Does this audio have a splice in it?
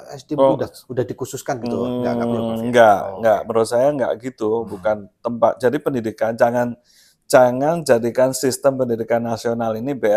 no; 0 cuts

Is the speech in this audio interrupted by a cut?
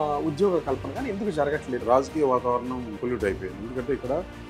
yes; 2 cuts; at 1.8 s, 2.9 s

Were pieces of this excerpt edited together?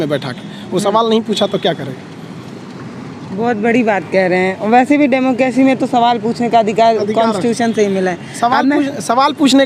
no; 0 cuts

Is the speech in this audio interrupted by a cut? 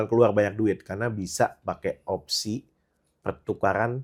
no; 0 cuts

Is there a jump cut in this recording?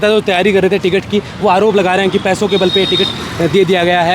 no; 0 cuts

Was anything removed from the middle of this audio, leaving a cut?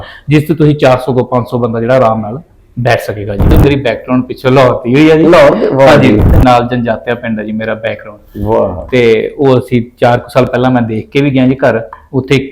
yes; 2 cuts; at 3.5 s, 6.3 s

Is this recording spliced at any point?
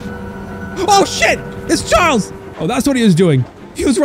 yes; 1 cut; at 2.4 s

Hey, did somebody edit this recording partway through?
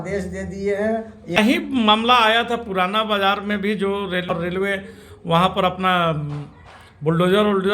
yes; 2 cuts; at 1.4 s, 4.3 s

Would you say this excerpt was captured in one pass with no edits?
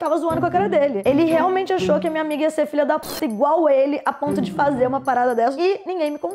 no; 2 cuts; at 1.0 s, 5.5 s

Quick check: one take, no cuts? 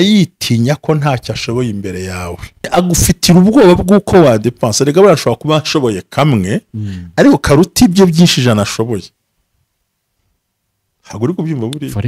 no; 1 cut; at 2.7 s

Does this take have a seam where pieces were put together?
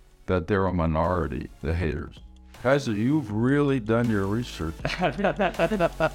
yes; 1 cut; at 2.5 s

